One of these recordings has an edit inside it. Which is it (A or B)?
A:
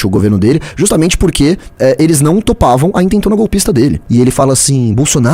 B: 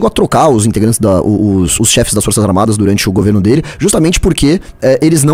A